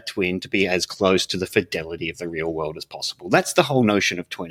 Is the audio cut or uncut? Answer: uncut